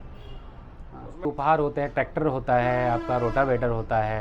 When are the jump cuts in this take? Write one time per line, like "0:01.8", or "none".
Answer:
0:01.3